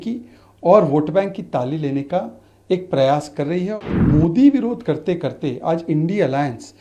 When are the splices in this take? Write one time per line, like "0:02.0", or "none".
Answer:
0:03.8